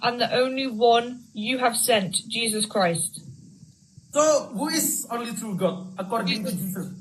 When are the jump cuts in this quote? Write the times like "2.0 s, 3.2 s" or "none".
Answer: none

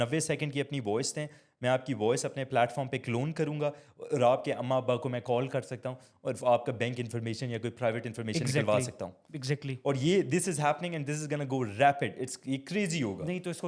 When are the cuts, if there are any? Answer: none

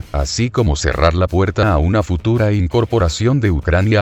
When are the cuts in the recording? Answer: none

